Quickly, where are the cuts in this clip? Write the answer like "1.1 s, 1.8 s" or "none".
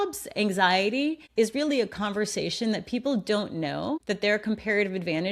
1.2 s, 4.0 s